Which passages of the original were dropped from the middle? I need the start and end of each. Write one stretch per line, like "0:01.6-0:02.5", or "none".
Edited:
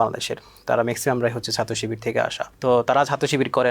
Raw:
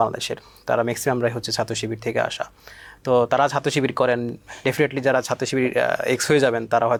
0:02.5-0:02.9